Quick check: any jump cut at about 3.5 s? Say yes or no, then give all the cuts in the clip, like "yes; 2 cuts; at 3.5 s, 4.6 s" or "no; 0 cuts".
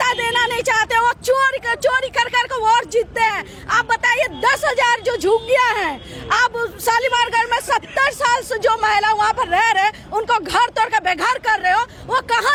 no; 0 cuts